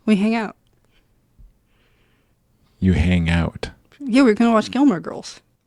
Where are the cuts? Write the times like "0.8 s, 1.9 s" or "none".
none

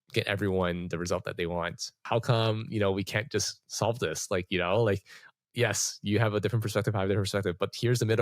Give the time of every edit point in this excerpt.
2.0 s

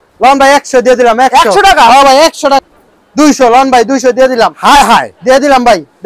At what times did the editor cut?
2.6 s

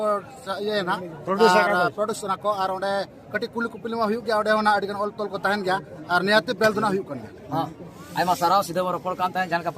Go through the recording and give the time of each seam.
none

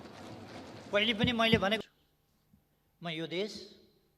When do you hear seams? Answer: 1.8 s

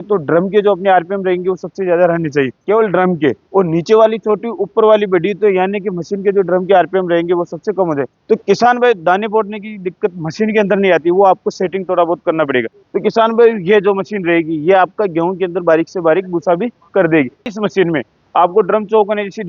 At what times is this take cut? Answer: 2.6 s, 8.1 s, 12.8 s, 17.4 s

